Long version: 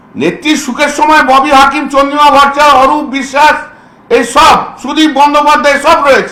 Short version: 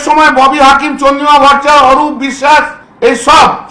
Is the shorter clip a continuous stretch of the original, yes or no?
no